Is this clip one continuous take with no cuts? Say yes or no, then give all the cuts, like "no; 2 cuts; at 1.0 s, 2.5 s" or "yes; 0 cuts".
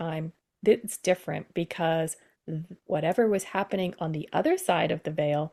yes; 0 cuts